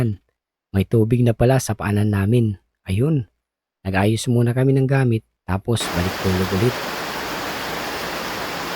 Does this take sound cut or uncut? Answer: cut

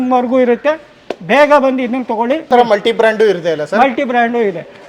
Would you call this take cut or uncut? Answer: cut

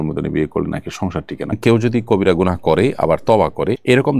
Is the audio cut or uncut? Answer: cut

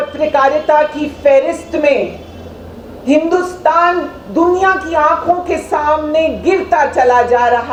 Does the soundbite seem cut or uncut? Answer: uncut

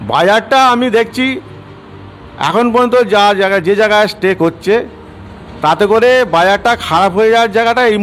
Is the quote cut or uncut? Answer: uncut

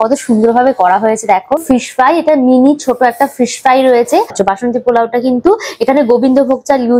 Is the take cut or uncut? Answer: cut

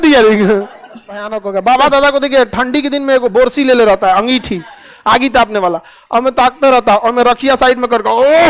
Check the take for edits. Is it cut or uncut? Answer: cut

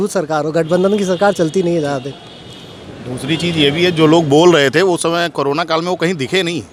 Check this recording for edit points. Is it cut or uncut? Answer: uncut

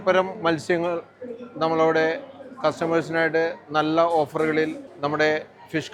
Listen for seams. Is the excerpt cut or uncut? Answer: uncut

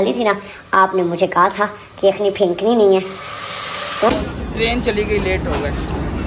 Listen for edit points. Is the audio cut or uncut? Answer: cut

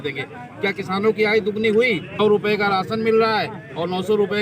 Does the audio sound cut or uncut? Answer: cut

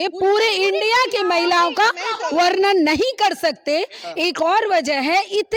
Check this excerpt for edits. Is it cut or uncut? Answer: uncut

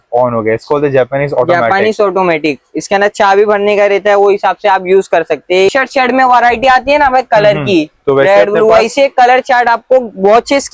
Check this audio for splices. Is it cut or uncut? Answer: cut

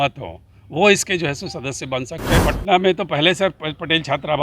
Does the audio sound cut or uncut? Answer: cut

